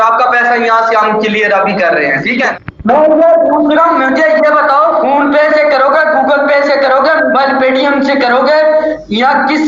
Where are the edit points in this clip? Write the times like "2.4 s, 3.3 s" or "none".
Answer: 2.5 s